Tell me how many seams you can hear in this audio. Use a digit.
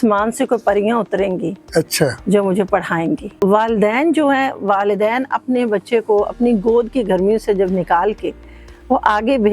1